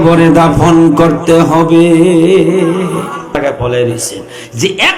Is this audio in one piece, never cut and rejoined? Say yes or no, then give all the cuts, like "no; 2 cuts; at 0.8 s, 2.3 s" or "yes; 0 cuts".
no; 1 cut; at 3.6 s